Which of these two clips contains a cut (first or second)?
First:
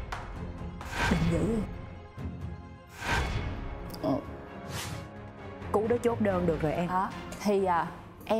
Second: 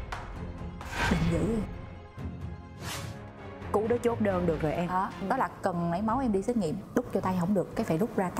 second